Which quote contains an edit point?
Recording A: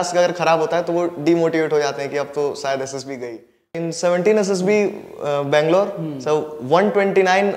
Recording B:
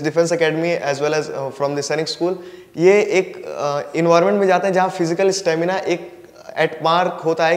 A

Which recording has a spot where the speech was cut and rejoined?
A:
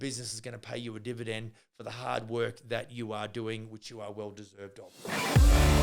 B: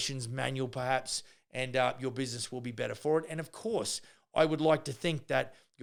A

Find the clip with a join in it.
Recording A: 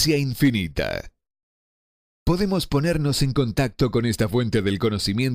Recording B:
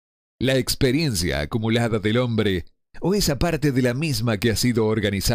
A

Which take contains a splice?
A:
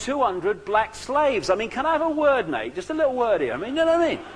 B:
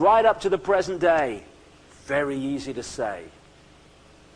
A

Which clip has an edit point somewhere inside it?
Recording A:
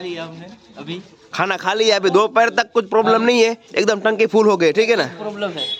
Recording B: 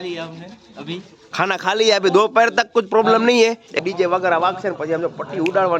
B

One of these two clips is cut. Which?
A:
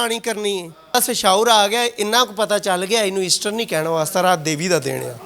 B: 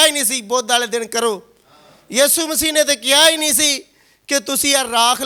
A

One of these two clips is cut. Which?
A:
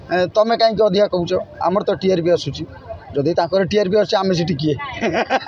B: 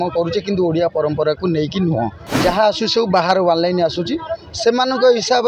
B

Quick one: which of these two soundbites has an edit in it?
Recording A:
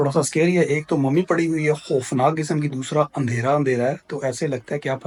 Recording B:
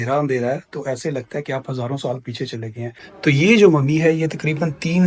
B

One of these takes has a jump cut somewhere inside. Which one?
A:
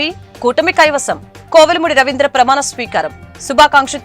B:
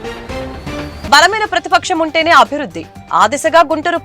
B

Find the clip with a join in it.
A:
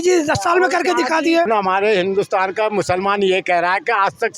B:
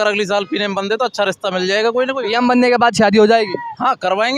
A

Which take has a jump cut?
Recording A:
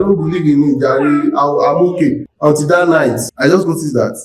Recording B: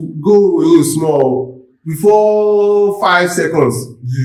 A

